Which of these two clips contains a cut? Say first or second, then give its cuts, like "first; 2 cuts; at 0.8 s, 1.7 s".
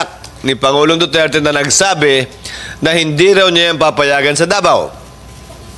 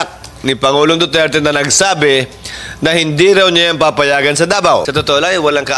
second; 1 cut; at 4.9 s